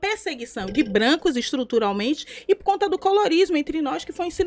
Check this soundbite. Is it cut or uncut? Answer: uncut